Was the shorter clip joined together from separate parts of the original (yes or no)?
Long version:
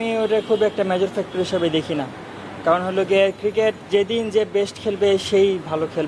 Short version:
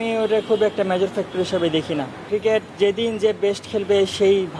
yes